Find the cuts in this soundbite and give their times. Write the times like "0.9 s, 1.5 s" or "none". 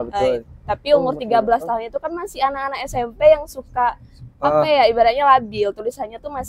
none